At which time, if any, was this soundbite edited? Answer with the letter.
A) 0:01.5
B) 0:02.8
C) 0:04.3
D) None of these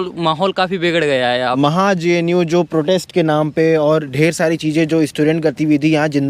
A